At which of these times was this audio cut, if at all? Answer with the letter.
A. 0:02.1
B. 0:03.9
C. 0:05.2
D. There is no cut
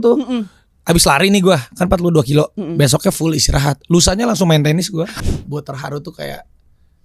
C